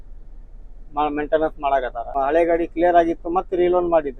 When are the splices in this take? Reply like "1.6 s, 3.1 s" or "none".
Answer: 2.0 s